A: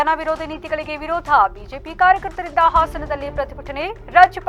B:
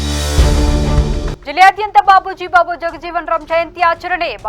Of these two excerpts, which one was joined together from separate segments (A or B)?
B